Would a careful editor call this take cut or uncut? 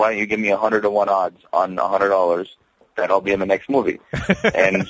uncut